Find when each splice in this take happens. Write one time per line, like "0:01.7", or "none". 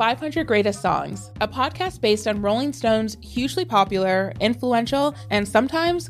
0:01.2
0:05.2

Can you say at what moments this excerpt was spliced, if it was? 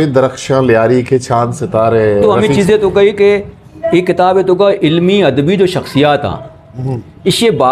0:02.2

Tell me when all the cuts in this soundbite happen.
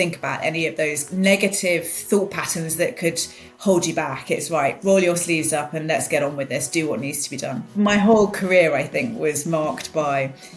0:01.0
0:07.6

